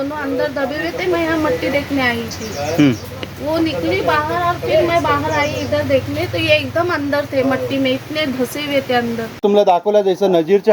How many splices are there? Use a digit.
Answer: 1